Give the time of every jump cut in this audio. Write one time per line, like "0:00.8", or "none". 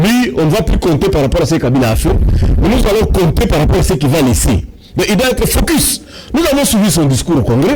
none